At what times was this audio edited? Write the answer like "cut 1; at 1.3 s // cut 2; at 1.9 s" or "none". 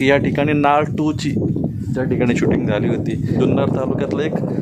cut 1; at 3.4 s